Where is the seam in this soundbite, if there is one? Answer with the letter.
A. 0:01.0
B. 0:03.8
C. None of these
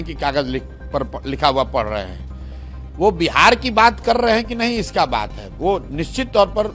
C